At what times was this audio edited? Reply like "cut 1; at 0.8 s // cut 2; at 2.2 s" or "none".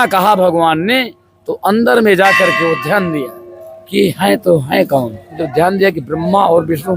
cut 1; at 5.4 s